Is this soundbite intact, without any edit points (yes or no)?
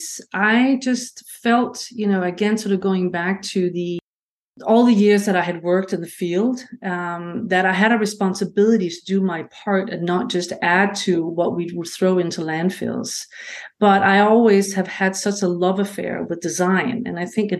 yes